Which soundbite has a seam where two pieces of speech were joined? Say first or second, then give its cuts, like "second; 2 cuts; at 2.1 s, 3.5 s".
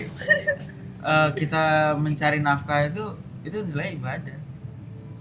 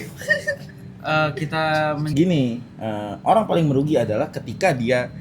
second; 1 cut; at 2.1 s